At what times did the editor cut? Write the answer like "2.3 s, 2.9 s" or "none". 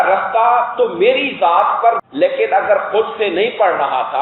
2.0 s